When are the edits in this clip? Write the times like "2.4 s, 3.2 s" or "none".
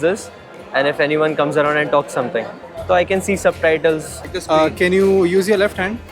4.2 s